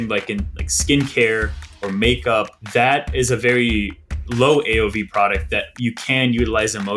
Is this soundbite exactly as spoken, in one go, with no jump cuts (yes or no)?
no